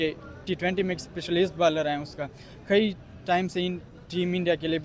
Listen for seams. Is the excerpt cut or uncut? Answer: uncut